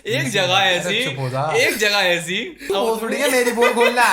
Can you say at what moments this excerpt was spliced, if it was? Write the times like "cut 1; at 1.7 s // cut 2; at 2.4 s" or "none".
cut 1; at 2.6 s